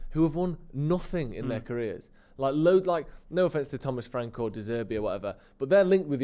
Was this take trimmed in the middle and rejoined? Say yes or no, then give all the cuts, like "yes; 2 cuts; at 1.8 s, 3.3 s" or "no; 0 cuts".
no; 0 cuts